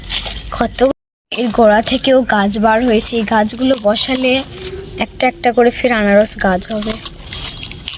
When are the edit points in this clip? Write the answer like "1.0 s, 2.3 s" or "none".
0.9 s